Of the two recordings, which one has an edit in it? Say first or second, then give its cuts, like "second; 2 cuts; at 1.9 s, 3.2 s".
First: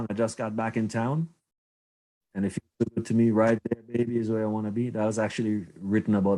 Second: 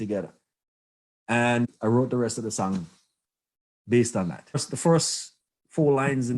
second; 2 cuts; at 1.7 s, 4.7 s